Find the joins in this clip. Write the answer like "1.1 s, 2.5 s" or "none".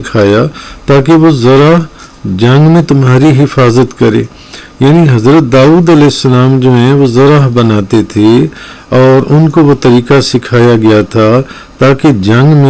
none